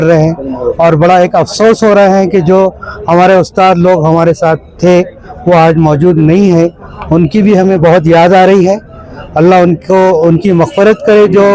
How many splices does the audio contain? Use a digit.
0